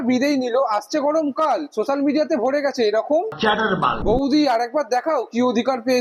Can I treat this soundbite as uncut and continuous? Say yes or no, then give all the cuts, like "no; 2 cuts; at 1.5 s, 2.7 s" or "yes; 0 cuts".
yes; 0 cuts